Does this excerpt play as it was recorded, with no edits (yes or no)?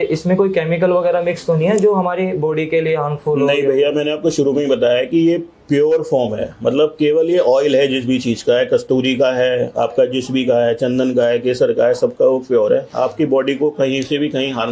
yes